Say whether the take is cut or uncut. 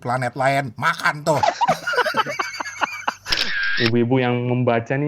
cut